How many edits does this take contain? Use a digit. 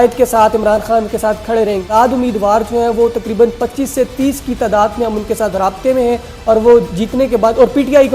1